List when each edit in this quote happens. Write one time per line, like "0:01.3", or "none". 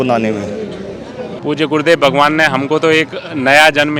0:01.3